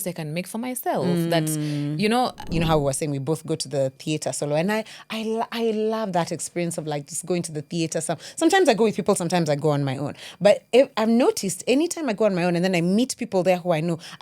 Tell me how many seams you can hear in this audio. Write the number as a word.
one